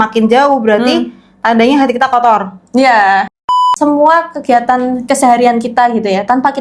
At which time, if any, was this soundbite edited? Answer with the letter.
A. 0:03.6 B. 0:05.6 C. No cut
A